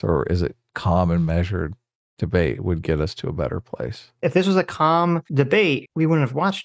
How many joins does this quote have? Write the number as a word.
two